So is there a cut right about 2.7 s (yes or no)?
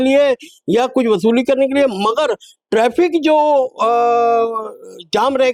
no